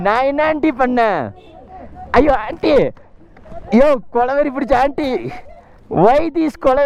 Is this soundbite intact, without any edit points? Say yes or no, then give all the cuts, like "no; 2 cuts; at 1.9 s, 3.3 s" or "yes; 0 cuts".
yes; 0 cuts